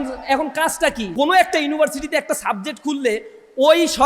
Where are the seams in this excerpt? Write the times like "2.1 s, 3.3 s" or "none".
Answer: 1.0 s